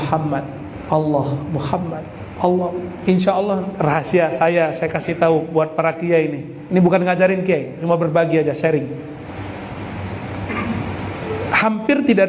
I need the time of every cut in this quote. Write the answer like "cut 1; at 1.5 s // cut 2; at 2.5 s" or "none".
cut 1; at 3.7 s